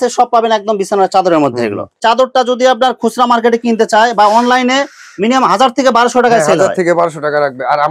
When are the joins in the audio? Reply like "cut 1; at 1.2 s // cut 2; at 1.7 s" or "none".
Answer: none